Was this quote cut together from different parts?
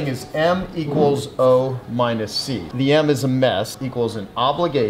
no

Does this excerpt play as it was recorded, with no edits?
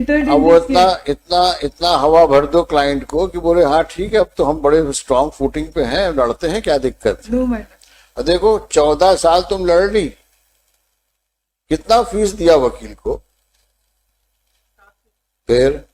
yes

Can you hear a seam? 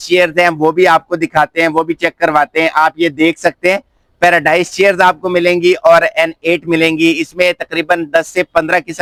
no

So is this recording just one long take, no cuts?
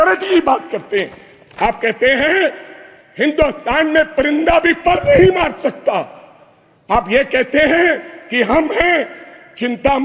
yes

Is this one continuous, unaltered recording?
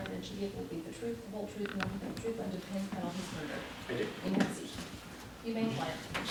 yes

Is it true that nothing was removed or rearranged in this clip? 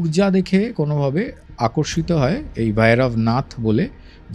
yes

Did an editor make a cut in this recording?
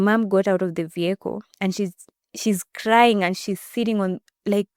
no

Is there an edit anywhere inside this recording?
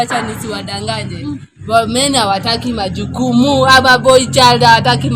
no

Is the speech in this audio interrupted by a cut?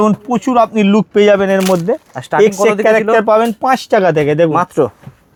no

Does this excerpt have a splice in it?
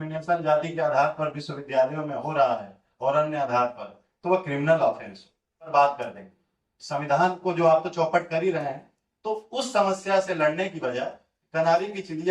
yes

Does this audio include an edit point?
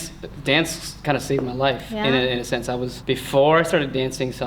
yes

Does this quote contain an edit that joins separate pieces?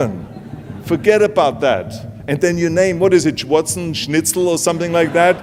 no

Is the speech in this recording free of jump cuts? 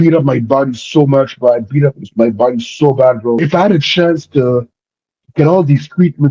no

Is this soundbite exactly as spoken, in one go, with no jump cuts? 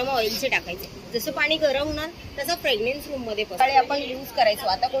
no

